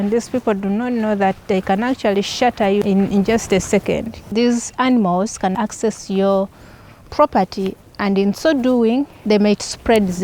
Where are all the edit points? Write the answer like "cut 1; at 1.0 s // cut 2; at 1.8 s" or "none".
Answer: cut 1; at 2.8 s // cut 2; at 4.2 s // cut 3; at 5.5 s // cut 4; at 9.1 s